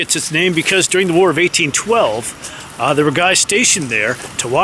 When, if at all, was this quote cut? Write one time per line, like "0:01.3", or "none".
none